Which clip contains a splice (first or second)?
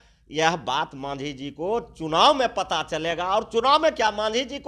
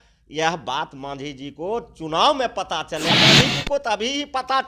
second